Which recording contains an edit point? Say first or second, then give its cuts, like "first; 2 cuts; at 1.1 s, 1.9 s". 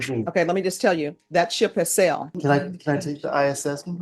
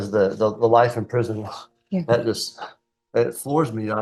first; 1 cut; at 2.3 s